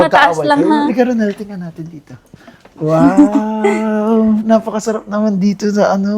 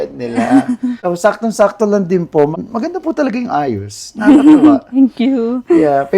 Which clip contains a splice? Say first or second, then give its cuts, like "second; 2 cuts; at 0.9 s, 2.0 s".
second; 2 cuts; at 1.0 s, 2.5 s